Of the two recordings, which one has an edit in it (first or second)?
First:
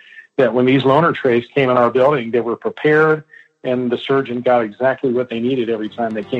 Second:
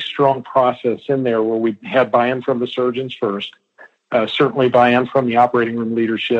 second